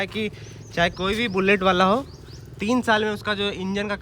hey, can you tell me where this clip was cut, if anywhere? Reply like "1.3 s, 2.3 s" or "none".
none